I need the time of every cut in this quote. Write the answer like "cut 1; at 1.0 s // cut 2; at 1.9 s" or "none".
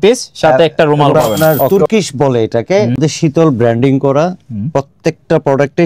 cut 1; at 1.3 s // cut 2; at 3.0 s